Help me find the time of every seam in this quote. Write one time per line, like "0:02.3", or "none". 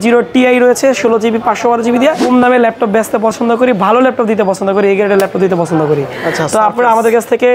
0:02.2